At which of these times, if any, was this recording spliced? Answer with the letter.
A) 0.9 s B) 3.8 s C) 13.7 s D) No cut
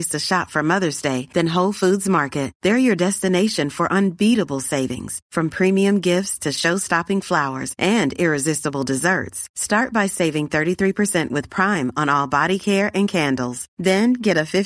D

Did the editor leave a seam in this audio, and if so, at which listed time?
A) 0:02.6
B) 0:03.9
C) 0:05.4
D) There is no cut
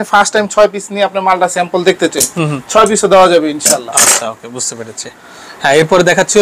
D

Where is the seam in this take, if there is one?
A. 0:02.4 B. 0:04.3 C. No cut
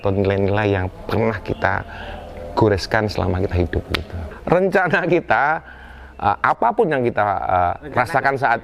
B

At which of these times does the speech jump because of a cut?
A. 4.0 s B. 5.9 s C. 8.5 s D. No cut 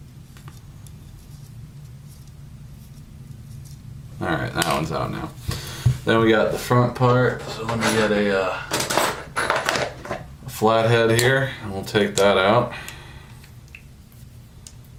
D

